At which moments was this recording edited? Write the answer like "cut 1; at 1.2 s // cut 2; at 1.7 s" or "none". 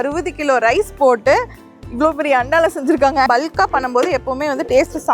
cut 1; at 3.3 s